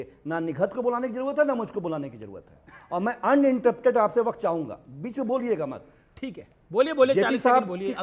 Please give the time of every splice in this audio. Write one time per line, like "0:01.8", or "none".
none